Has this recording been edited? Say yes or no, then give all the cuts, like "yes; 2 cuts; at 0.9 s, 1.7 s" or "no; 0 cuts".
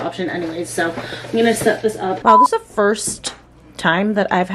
yes; 1 cut; at 2.2 s